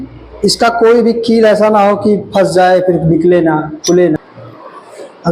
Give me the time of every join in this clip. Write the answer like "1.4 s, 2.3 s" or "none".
4.2 s